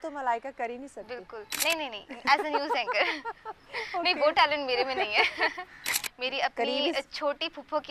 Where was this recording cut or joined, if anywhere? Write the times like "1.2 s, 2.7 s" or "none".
1.5 s, 5.9 s